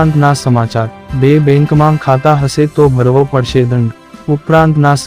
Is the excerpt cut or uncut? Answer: cut